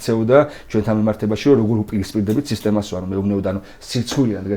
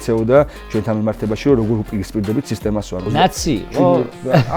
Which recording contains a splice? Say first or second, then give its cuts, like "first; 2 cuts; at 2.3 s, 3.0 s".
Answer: second; 1 cut; at 3.1 s